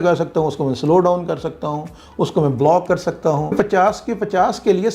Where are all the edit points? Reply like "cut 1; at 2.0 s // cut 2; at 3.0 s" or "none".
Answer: cut 1; at 3.5 s